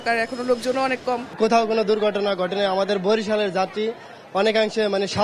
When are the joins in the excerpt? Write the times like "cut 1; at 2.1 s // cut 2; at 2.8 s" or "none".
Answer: cut 1; at 1.4 s